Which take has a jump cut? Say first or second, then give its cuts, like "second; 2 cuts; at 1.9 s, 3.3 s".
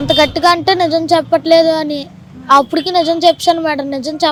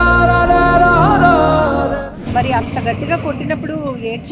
second; 1 cut; at 2.2 s